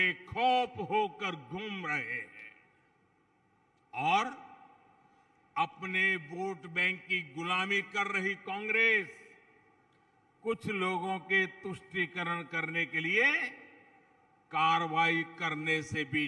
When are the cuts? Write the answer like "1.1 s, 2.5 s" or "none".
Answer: none